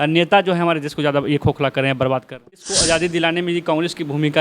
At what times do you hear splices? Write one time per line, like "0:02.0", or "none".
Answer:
0:02.7